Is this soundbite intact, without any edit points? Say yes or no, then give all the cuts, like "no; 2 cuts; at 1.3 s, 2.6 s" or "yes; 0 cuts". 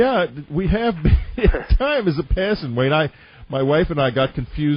yes; 0 cuts